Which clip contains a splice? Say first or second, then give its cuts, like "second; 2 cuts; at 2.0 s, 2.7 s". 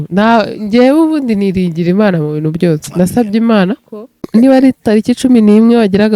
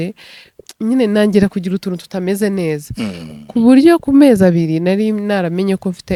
first; 1 cut; at 4.3 s